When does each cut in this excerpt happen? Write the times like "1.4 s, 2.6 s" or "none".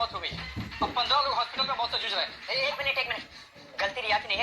2.4 s